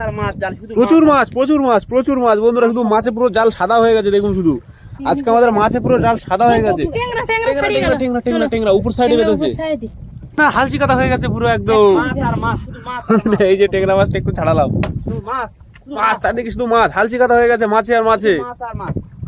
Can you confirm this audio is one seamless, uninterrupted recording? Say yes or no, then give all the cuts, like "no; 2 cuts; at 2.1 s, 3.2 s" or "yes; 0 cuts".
yes; 0 cuts